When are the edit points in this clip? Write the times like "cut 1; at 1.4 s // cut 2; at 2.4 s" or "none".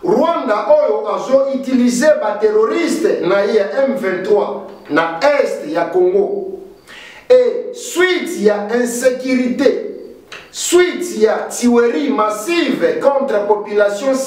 none